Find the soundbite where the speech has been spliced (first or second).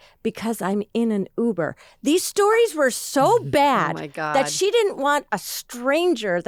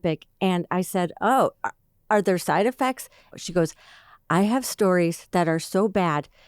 second